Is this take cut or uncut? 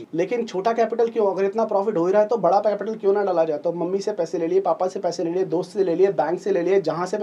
uncut